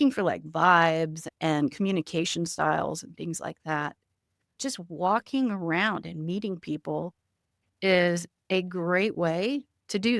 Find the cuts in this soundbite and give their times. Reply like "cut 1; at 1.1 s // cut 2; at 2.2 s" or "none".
cut 1; at 1.2 s // cut 2; at 4.6 s